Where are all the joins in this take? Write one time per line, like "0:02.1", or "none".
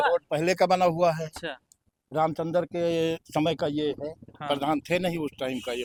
none